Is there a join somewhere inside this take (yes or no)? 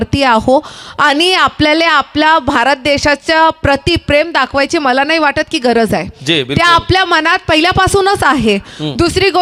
no